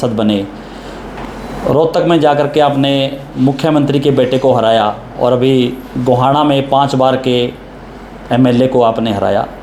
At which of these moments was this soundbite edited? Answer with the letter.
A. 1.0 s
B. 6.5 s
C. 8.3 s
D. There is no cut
D